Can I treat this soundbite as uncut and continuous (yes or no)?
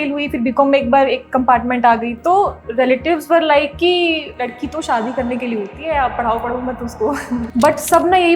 no